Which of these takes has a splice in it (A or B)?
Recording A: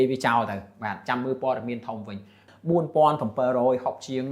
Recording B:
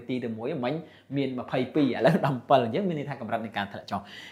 A